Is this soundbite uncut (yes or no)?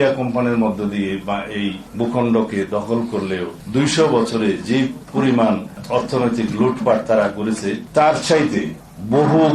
no